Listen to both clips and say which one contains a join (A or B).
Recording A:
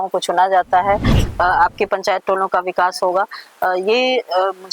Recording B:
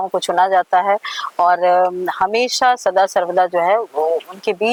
A